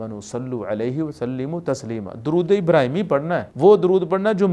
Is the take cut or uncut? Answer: cut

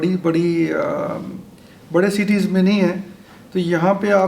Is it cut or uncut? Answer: uncut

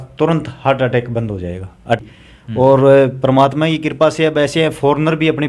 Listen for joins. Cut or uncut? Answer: cut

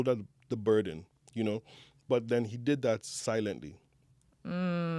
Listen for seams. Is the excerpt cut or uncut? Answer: uncut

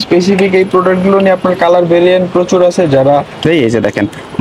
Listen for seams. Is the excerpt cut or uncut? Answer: cut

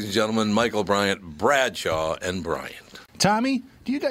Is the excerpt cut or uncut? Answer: cut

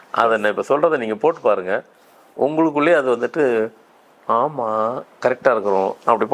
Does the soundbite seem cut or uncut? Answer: uncut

